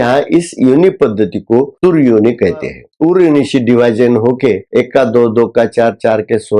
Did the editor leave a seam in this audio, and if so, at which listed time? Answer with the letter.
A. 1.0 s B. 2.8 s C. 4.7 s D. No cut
B